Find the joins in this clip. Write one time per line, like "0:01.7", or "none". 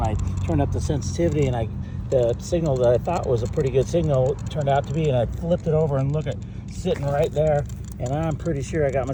none